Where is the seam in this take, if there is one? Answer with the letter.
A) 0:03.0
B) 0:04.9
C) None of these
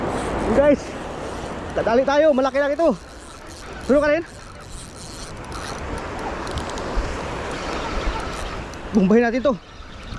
C